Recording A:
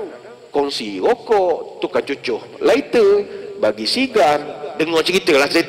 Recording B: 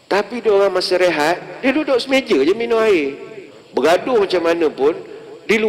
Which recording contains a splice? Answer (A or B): B